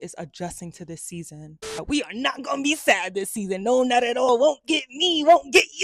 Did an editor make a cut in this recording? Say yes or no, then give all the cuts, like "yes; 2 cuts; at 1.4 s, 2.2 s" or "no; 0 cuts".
yes; 2 cuts; at 1.8 s, 4.3 s